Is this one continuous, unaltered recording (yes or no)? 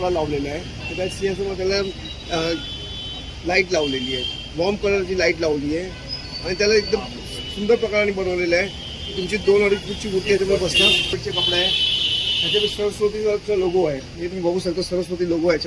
no